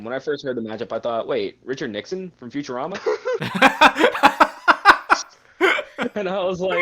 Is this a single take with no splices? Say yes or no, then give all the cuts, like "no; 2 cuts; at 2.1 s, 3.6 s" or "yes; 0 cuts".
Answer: no; 1 cut; at 3.4 s